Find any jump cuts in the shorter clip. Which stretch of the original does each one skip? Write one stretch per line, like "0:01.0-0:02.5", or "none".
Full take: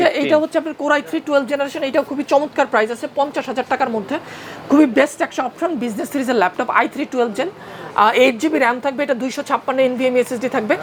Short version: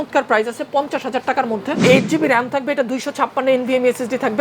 0:04.3-0:08.1